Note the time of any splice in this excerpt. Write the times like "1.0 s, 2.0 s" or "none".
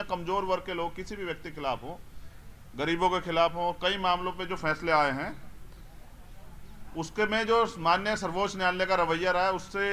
none